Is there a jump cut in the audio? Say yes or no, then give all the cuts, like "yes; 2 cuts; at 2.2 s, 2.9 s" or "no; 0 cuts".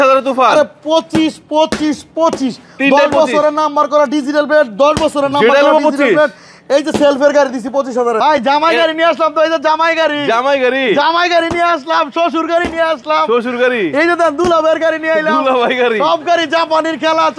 yes; 1 cut; at 8.2 s